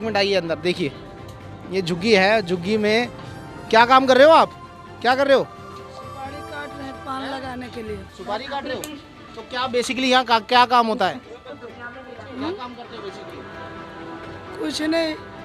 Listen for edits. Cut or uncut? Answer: uncut